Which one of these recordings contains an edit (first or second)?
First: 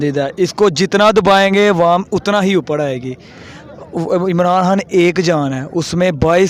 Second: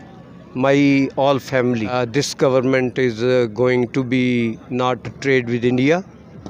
second